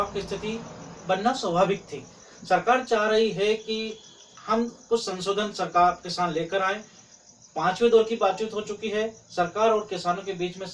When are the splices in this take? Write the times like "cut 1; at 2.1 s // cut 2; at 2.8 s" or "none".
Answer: none